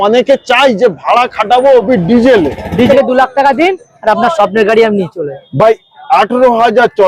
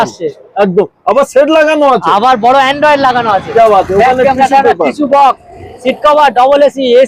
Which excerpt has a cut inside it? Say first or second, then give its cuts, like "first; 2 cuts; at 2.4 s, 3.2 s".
first; 1 cut; at 2.9 s